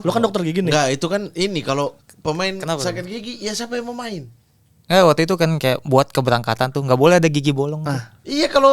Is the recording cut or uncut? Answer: uncut